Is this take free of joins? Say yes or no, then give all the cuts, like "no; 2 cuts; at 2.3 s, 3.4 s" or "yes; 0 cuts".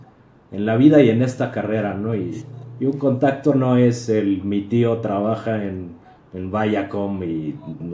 yes; 0 cuts